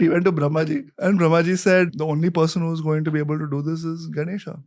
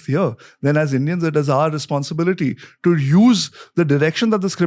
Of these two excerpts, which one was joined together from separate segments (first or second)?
first